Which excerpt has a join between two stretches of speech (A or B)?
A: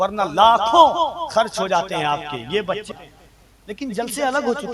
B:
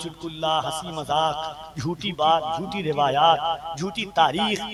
A